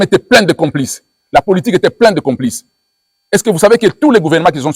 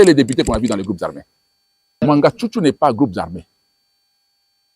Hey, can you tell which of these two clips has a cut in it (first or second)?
second